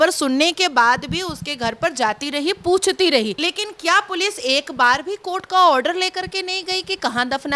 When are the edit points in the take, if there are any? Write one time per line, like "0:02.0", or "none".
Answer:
none